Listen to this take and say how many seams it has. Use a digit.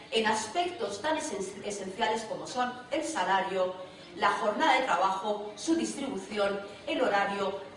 0